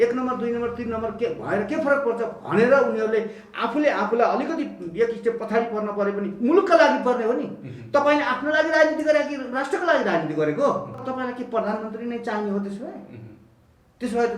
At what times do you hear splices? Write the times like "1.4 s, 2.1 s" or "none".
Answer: 11.1 s